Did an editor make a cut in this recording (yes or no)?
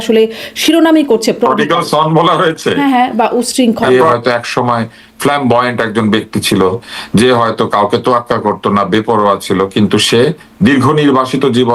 yes